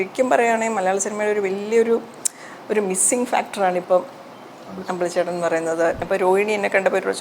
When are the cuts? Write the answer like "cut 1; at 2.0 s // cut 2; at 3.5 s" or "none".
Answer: cut 1; at 6.0 s